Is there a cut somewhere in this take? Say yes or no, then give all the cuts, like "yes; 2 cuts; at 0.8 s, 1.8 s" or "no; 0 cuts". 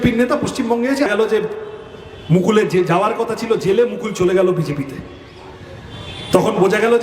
yes; 1 cut; at 1.1 s